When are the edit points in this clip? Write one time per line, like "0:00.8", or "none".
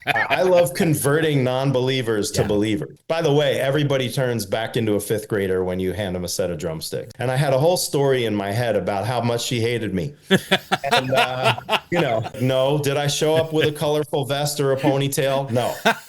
0:02.9
0:07.0
0:12.4